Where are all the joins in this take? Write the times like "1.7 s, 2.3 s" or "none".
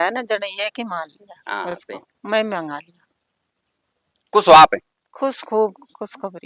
none